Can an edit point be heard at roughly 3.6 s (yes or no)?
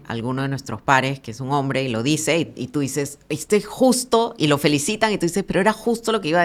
no